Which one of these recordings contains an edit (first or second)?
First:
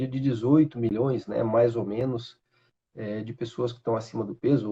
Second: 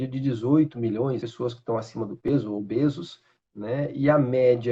second